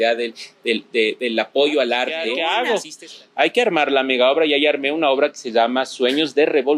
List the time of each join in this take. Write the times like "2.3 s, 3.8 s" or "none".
2.2 s